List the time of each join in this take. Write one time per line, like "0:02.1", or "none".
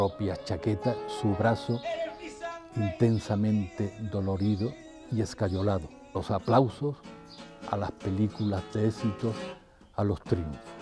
none